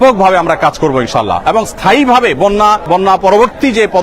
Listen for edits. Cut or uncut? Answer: uncut